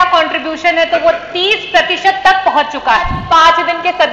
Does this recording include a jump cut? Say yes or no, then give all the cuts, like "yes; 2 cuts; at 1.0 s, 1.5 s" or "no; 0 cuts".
yes; 1 cut; at 3.2 s